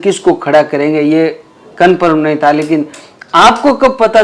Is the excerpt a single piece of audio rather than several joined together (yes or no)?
yes